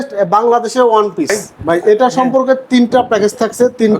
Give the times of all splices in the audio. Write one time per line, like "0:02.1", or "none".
0:01.5